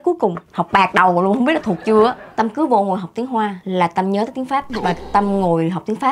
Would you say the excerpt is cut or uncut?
cut